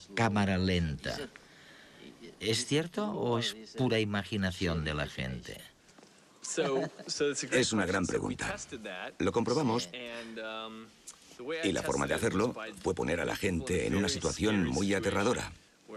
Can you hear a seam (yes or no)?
no